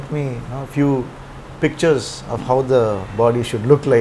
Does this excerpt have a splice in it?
no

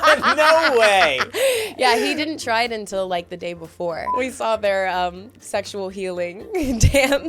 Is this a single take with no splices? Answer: no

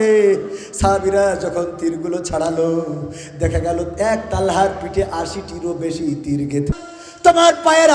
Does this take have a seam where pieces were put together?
yes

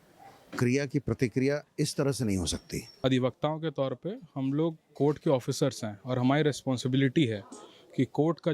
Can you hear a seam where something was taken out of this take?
yes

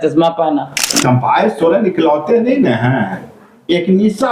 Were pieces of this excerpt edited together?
yes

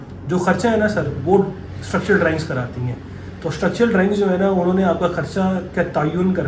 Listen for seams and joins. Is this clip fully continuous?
yes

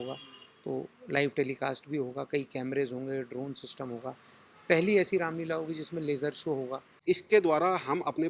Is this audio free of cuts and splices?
no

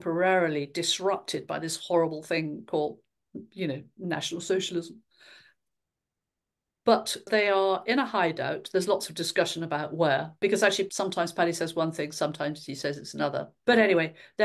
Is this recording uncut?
no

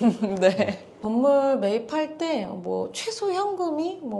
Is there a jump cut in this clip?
yes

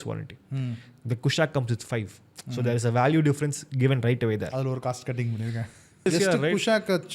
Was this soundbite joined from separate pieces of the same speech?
yes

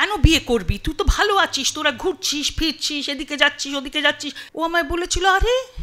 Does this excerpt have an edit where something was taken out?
yes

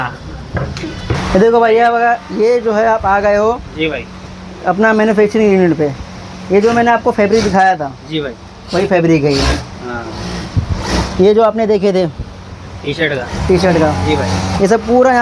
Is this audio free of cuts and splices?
no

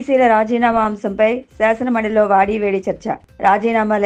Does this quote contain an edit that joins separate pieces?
no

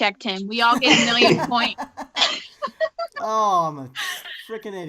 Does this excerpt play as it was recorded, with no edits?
no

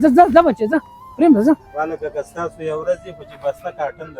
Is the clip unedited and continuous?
yes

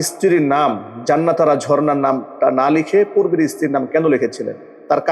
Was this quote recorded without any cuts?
yes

